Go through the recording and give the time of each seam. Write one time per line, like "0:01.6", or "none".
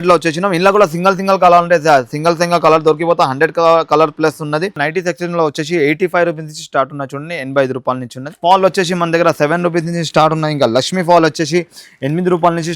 0:04.8
0:08.4